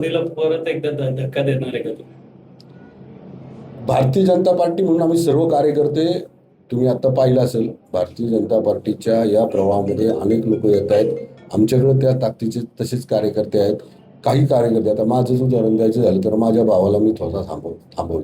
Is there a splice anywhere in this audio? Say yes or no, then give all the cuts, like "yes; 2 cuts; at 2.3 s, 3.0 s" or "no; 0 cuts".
no; 0 cuts